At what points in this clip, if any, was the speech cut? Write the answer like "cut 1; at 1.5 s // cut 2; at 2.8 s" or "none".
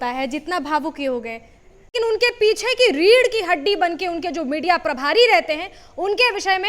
cut 1; at 1.9 s

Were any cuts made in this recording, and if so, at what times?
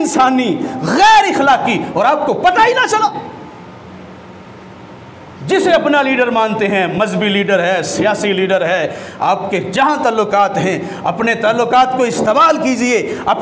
none

